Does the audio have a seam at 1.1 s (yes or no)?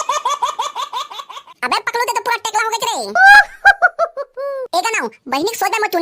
yes